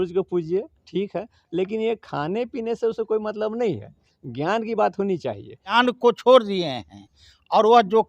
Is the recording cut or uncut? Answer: cut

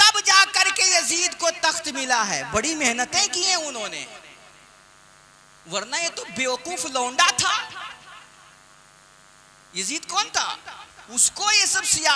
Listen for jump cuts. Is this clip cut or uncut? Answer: uncut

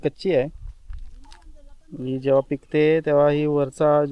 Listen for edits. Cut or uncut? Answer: uncut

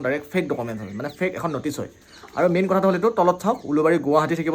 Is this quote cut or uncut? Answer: uncut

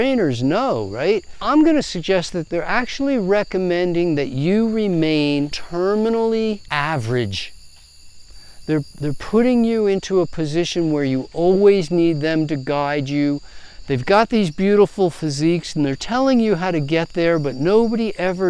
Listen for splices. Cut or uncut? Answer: cut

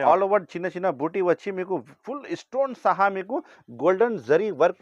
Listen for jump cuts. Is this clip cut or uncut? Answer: uncut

